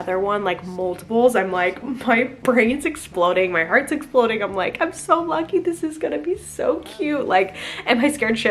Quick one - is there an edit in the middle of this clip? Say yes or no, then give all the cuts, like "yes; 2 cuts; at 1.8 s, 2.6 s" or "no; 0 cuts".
no; 0 cuts